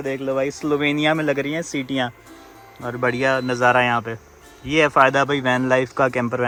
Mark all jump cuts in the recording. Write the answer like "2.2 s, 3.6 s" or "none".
none